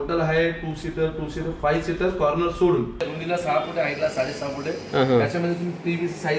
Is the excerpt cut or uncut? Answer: cut